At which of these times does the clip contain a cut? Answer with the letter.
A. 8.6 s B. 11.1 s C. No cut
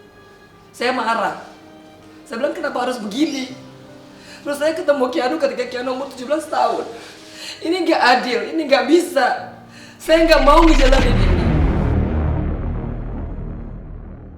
B